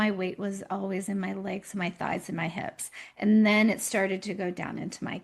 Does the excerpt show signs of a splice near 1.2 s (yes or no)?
no